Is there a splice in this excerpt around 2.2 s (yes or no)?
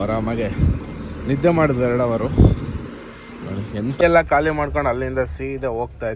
no